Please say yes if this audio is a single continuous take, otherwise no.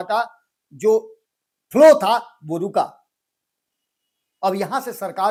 yes